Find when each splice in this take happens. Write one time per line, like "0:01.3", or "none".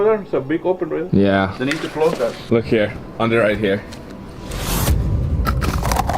0:02.4